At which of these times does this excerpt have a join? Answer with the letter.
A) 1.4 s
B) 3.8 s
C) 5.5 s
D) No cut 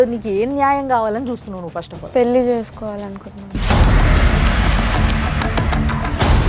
D